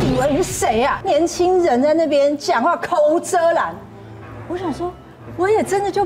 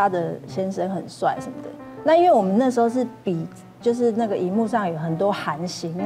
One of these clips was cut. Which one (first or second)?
first